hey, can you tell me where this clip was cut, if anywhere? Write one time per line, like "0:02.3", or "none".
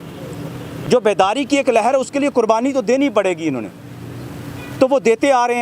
none